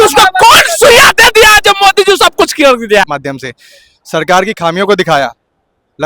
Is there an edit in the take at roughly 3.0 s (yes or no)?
yes